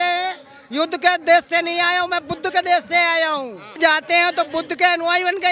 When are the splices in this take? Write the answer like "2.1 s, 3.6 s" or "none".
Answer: 3.8 s